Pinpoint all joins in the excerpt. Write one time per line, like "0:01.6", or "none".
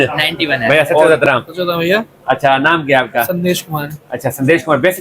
0:01.1